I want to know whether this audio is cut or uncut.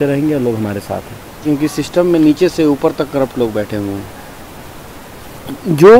cut